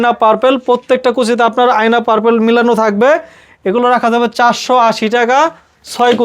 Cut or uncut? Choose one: uncut